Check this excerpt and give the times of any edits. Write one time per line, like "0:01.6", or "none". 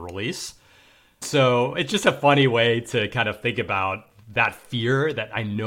0:01.2

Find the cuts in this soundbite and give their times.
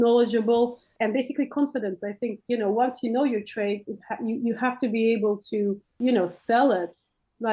0:00.9
0:05.9

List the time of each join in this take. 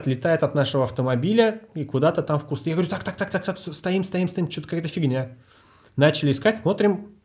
none

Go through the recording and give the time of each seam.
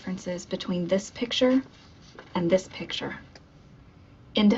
none

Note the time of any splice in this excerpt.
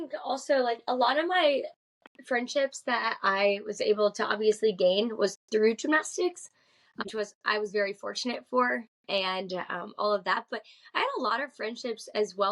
0:07.0

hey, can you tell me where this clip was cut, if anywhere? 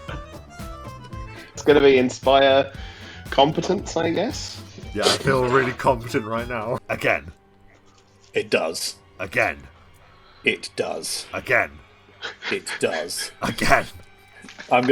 0:01.6
0:06.8

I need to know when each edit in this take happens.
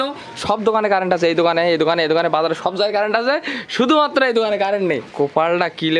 0:05.1

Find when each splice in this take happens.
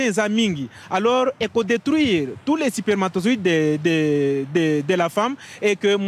none

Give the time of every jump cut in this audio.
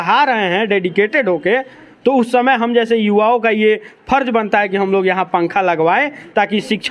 none

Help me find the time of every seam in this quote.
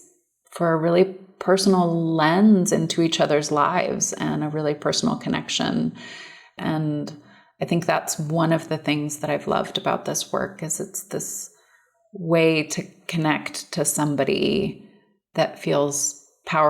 0:06.6
0:15.2

